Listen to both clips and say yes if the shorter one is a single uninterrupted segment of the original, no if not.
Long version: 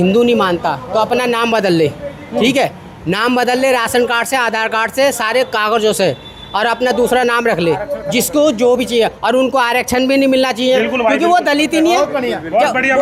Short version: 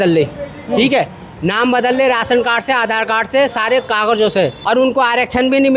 no